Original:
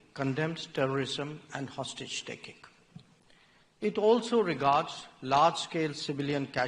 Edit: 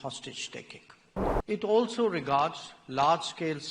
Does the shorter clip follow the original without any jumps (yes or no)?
no